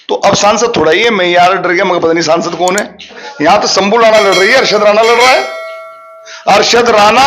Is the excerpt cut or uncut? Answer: cut